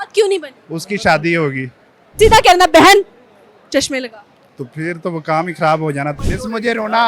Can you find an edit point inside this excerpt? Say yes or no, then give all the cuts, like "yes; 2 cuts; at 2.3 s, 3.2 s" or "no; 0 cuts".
yes; 2 cuts; at 2.2 s, 6.2 s